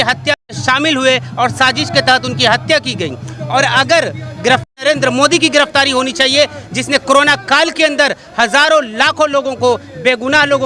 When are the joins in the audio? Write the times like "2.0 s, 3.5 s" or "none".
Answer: none